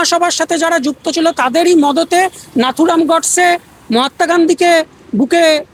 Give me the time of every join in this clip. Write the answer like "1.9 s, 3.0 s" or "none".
none